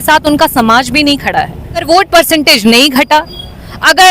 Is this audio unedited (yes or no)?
no